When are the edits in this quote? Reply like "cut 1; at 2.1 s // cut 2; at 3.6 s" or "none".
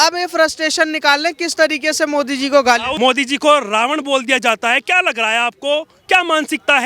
cut 1; at 2.9 s